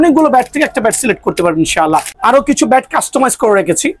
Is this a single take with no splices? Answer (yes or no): no